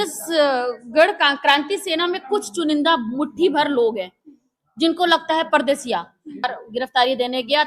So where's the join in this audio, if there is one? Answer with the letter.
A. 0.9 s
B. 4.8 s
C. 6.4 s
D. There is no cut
C